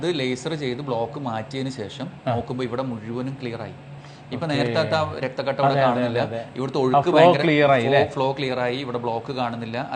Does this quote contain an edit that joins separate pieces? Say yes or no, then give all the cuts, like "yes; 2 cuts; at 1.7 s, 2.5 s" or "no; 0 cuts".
no; 0 cuts